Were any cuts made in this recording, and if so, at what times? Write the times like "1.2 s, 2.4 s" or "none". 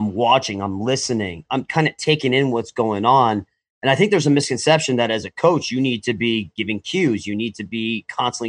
none